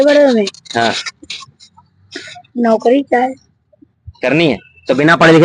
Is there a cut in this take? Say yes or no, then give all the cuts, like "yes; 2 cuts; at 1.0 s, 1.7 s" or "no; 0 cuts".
no; 0 cuts